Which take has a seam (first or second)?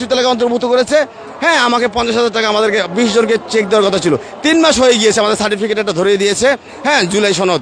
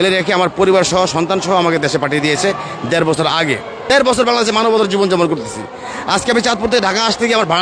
second